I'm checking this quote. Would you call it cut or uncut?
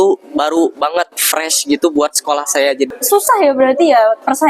cut